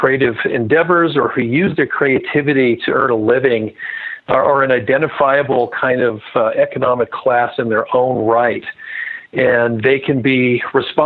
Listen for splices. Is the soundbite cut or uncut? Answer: uncut